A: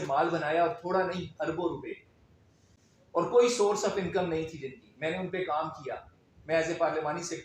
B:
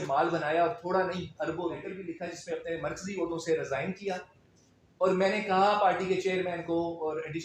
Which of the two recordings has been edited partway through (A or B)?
B